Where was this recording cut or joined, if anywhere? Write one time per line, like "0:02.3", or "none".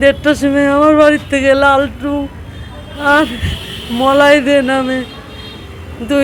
none